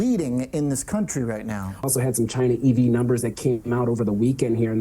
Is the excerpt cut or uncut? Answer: cut